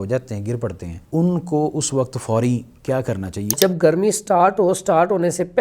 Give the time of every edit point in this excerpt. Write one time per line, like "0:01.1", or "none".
0:00.9
0:03.5